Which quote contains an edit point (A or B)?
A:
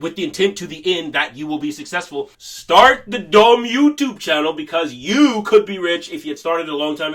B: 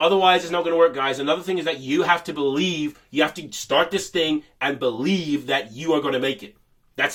A